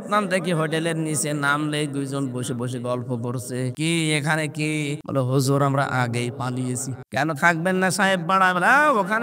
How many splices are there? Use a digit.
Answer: 3